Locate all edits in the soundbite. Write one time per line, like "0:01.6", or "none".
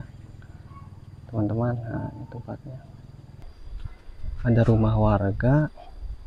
0:03.4